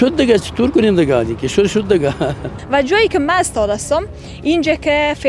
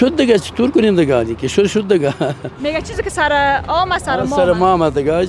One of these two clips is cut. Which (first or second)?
first